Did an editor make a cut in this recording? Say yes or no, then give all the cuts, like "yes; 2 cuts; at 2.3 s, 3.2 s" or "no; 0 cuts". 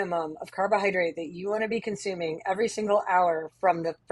no; 0 cuts